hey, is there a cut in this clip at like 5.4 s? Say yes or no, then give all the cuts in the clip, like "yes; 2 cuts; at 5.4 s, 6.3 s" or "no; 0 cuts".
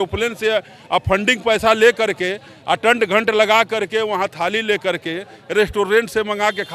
no; 0 cuts